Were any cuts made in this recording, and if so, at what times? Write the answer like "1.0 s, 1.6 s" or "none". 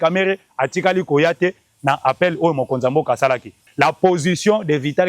3.7 s